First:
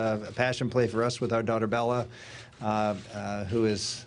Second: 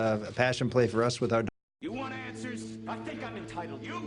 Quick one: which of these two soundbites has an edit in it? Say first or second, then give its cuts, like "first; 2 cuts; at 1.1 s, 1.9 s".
first; 1 cut; at 1.5 s